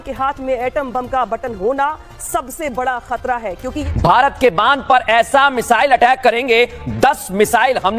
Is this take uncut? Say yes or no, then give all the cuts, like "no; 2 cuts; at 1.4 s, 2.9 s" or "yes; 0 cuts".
no; 1 cut; at 3.8 s